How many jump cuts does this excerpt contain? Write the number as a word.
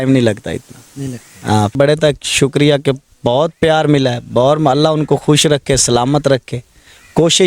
one